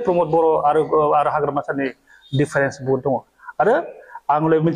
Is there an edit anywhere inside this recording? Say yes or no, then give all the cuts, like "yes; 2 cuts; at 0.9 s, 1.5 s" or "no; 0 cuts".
no; 0 cuts